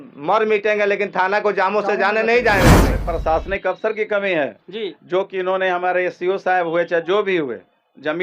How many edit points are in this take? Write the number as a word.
one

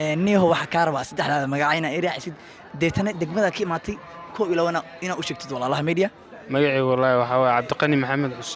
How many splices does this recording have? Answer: zero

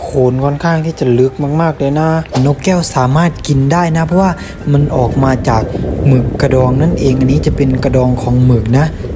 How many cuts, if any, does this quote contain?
one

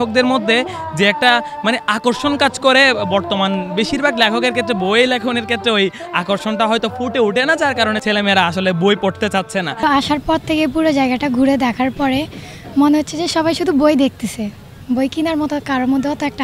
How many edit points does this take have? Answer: two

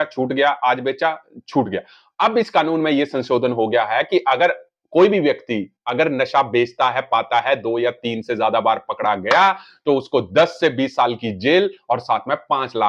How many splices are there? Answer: zero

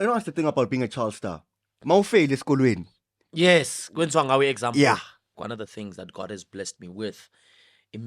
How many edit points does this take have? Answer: one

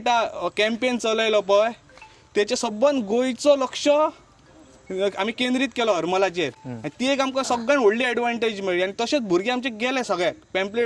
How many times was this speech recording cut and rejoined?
zero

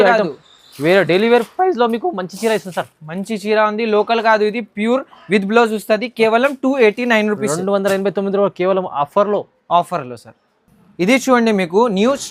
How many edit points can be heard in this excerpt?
zero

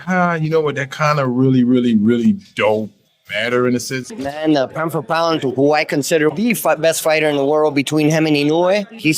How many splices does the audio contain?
one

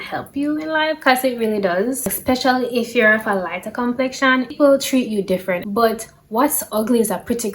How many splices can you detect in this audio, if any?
three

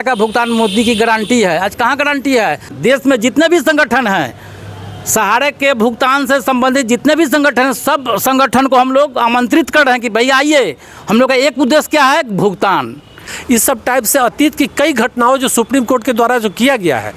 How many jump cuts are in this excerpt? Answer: two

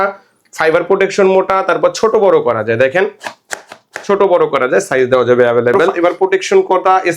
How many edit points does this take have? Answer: one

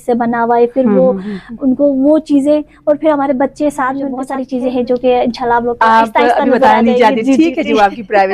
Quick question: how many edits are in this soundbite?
one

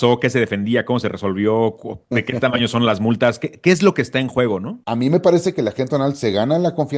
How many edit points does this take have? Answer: one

